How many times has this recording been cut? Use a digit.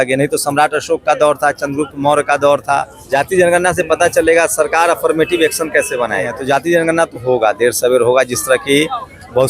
2